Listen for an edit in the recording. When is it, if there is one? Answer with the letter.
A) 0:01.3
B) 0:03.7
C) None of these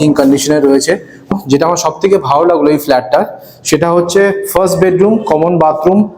A